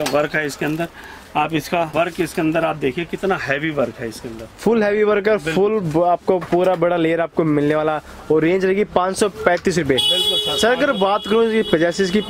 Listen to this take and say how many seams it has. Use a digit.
0